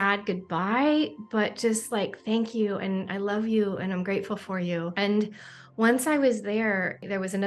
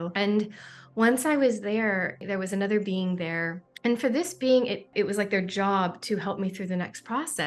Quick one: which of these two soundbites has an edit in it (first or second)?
second